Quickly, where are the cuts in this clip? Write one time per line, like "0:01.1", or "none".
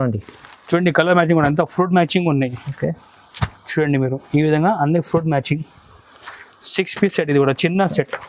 none